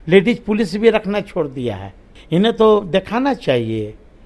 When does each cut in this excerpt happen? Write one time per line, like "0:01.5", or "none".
0:02.2